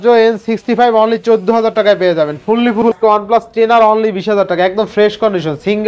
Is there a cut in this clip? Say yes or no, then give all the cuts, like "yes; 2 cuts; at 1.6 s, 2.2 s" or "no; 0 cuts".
yes; 1 cut; at 2.8 s